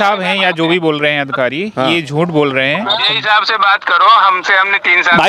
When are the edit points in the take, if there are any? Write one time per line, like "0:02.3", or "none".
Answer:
0:03.0